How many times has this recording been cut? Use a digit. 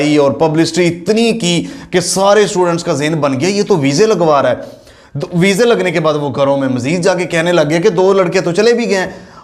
0